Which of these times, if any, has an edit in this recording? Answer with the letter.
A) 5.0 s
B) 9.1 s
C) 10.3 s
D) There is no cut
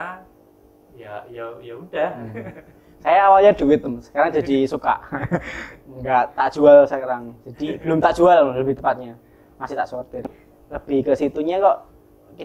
C